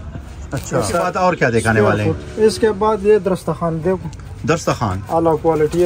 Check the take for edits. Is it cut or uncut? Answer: cut